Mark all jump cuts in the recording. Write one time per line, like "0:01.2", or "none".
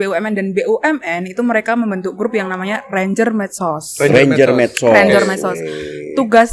none